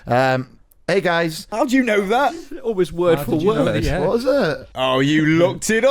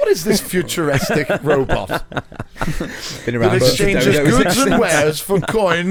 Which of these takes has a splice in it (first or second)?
first